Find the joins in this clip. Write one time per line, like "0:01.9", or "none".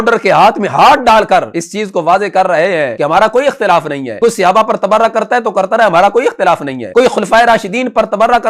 0:01.6
0:02.9
0:04.0
0:06.8